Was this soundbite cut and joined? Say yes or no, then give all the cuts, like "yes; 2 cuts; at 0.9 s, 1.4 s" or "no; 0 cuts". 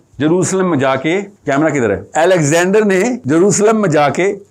yes; 3 cuts; at 1.3 s, 2.1 s, 3.2 s